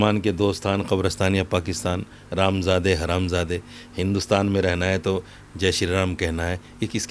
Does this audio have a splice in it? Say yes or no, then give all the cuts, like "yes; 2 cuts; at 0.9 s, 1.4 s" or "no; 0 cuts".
no; 0 cuts